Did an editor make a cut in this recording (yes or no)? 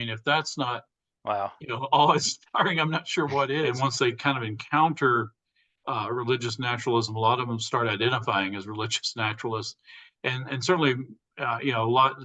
yes